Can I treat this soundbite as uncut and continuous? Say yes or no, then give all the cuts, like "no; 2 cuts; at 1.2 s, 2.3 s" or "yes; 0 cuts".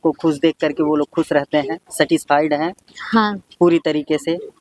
yes; 0 cuts